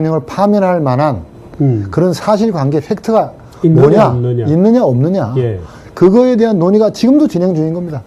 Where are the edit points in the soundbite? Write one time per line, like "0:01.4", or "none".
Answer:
0:01.4